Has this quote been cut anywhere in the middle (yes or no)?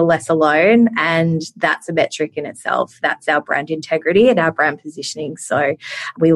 no